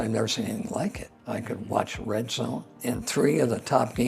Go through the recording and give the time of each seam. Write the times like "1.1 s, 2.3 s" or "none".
1.1 s, 2.7 s

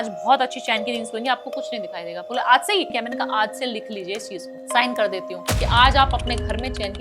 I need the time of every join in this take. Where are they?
2.9 s

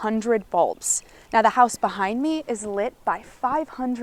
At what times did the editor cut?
none

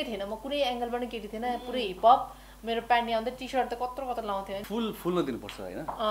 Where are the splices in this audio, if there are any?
4.6 s

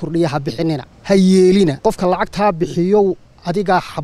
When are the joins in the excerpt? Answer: 0.9 s, 1.8 s

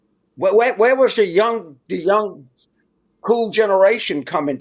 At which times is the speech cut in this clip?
none

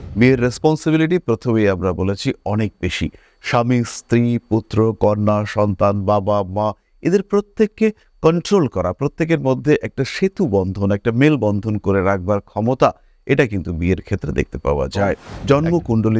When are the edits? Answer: 15.3 s

